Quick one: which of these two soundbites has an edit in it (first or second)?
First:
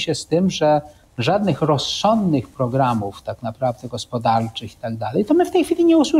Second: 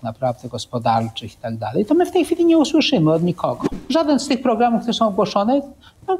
second